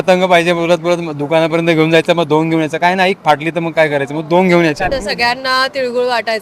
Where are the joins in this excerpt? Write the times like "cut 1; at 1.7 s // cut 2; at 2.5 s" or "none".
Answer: cut 1; at 4.9 s